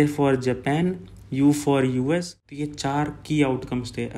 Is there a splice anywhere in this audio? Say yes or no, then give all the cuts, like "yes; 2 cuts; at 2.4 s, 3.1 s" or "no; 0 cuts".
yes; 1 cut; at 2.4 s